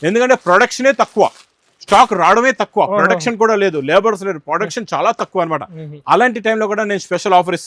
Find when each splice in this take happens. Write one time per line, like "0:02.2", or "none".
none